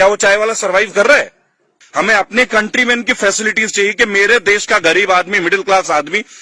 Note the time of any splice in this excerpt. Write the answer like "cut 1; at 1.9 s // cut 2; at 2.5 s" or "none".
cut 1; at 1.7 s

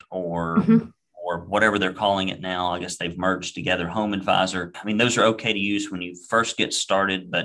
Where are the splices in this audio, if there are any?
cut 1; at 4.7 s

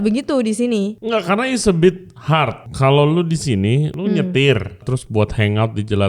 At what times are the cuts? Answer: cut 1; at 1.0 s // cut 2; at 2.6 s // cut 3; at 3.9 s // cut 4; at 4.9 s

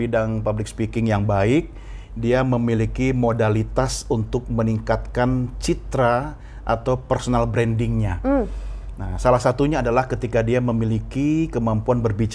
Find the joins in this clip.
none

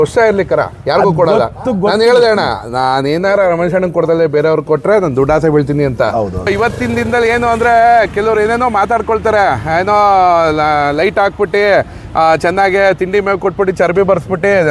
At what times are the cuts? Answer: cut 1; at 6.5 s

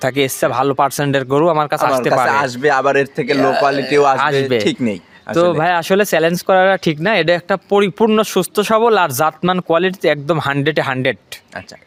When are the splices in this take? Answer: none

